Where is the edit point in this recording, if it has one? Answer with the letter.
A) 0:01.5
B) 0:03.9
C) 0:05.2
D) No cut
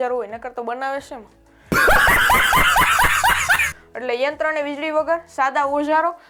D